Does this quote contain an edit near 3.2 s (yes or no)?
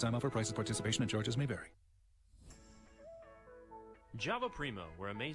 no